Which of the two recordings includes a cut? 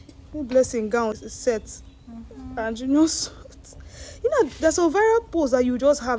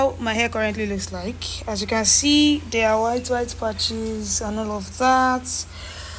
first; 1 cut; at 1.2 s

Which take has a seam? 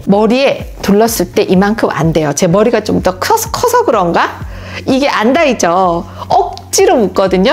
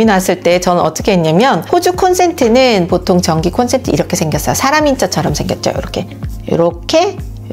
second; 1 cut; at 1.7 s

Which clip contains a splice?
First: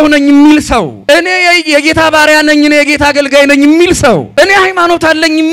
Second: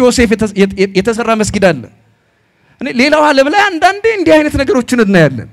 first; 2 cuts; at 0.9 s, 4.3 s

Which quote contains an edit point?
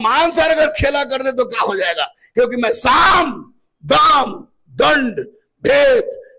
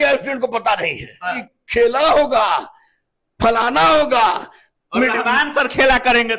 second; 1 cut; at 1.4 s

